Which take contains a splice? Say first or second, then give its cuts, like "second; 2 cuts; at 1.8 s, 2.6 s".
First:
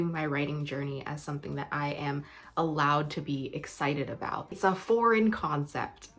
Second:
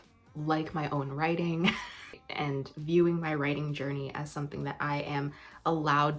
second; 1 cut; at 2.0 s